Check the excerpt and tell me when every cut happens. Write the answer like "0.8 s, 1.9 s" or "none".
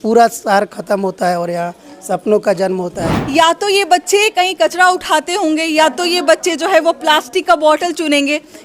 3.1 s